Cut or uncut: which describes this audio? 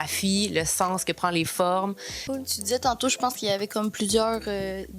cut